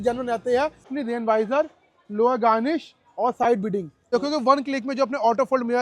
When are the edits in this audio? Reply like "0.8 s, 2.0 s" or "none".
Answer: 0.9 s, 4.1 s